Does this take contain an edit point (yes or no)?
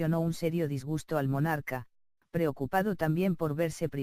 yes